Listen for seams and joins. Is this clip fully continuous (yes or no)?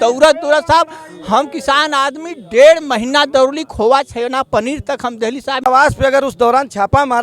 no